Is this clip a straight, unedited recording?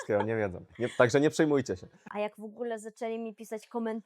no; 1 cut; at 1.9 s

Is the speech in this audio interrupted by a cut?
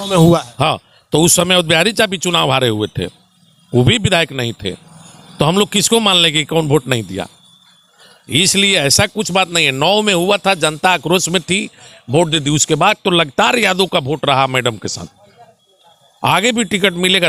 no; 0 cuts

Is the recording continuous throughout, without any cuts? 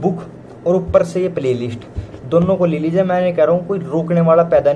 yes; 0 cuts

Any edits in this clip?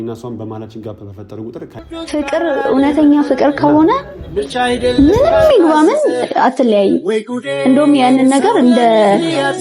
yes; 1 cut; at 1.8 s

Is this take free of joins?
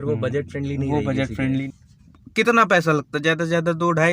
no; 1 cut; at 1.5 s

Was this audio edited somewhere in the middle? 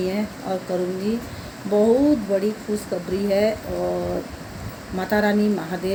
no; 0 cuts

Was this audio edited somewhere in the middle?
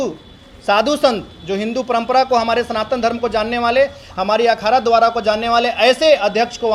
no; 0 cuts

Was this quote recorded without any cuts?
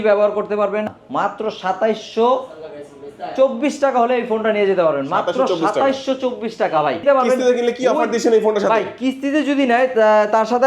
no; 2 cuts; at 1.0 s, 7.0 s

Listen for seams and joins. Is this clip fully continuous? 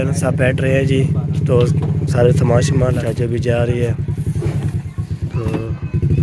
no; 1 cut; at 3.0 s

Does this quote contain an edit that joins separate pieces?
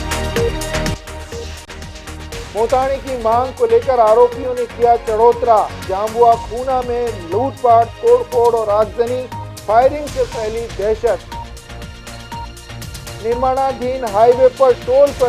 yes; 1 cut; at 0.9 s

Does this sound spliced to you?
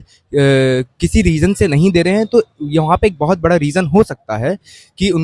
no; 0 cuts

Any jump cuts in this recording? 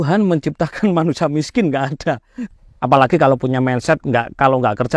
yes; 1 cut; at 2.4 s

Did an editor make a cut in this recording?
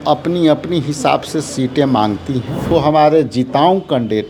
yes; 1 cut; at 2.7 s

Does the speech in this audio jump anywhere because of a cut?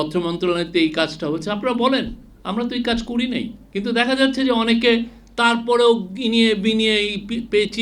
yes; 1 cut; at 3.6 s

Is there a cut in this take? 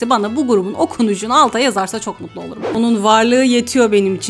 yes; 1 cut; at 2.7 s

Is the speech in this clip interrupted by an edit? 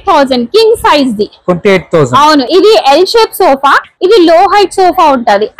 yes; 1 cut; at 2.5 s

